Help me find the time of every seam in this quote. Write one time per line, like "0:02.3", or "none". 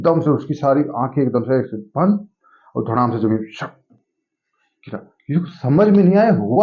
none

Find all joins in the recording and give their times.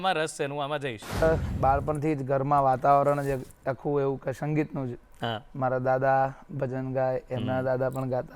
0:01.2

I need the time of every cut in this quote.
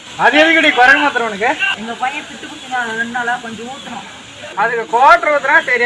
0:01.7
0:04.3

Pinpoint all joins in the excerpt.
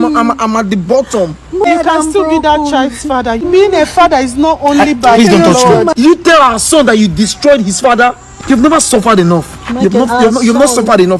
0:01.6
0:03.5
0:05.9
0:08.3

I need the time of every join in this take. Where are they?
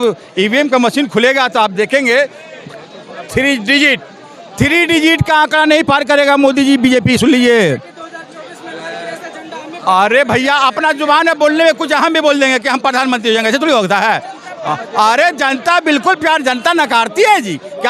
none

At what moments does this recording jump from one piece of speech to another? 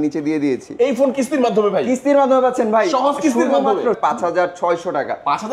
0:04.0

